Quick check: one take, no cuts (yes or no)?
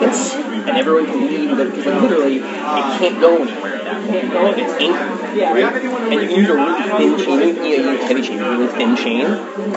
yes